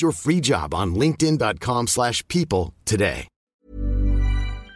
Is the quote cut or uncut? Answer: cut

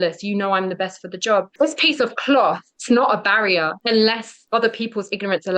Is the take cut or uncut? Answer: cut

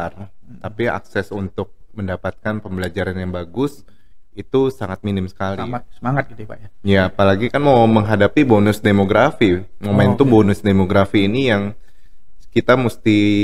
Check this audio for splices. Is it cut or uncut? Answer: cut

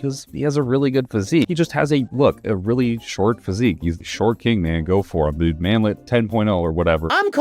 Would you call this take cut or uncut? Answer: cut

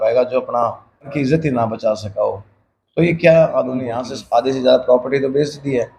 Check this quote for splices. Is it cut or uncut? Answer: cut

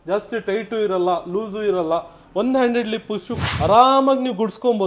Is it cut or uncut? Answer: cut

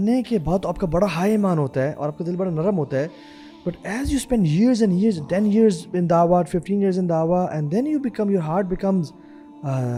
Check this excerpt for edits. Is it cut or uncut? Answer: uncut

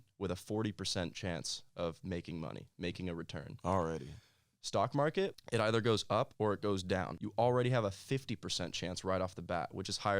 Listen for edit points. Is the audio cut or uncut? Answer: cut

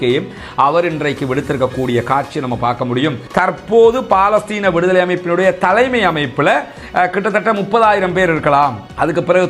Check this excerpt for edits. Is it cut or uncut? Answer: cut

